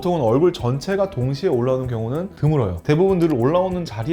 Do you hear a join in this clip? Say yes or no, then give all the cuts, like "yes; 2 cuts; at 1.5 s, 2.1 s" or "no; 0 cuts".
no; 0 cuts